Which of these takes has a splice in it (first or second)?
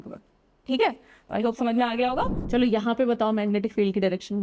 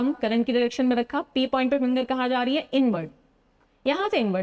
first